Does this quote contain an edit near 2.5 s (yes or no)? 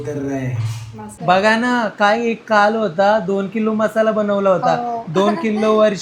no